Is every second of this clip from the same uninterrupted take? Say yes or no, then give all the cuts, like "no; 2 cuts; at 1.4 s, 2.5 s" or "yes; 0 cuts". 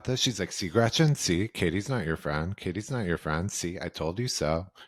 yes; 0 cuts